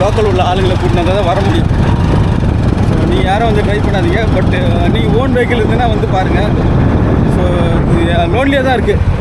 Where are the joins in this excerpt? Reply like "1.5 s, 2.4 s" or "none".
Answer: none